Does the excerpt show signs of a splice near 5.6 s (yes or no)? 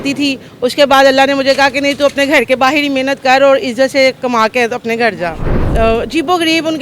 yes